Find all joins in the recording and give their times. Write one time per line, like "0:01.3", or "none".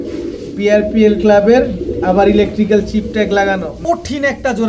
0:03.7